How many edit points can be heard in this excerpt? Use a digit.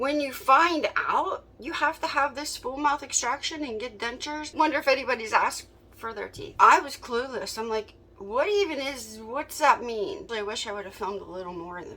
3